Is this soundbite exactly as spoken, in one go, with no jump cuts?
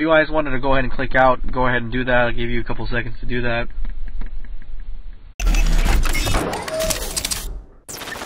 yes; 0 cuts

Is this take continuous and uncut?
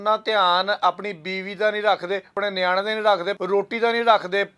no; 2 cuts; at 2.4 s, 3.3 s

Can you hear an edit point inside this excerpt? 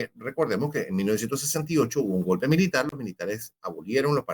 no; 0 cuts

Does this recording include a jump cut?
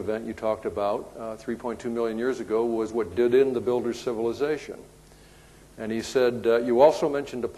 no; 0 cuts

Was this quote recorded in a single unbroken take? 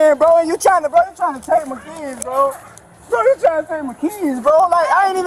yes; 0 cuts

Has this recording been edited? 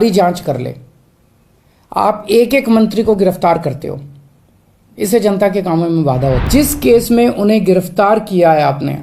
yes; 1 cut; at 6.4 s

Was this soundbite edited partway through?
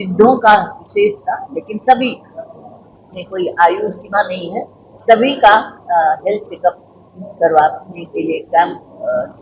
no; 0 cuts

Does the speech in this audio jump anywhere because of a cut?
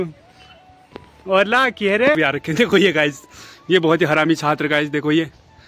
yes; 1 cut; at 2.2 s

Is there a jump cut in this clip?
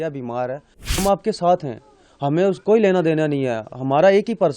yes; 1 cut; at 1.0 s

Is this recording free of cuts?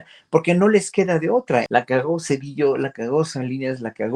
no; 1 cut; at 1.6 s

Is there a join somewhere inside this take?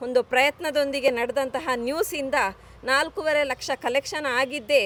no; 0 cuts

